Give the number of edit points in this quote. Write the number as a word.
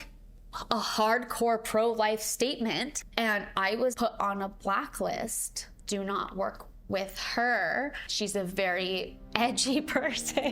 four